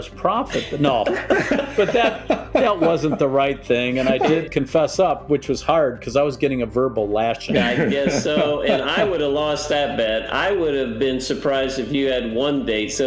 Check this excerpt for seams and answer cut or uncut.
cut